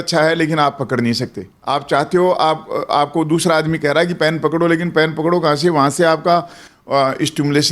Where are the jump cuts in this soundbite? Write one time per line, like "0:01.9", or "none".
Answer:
0:01.5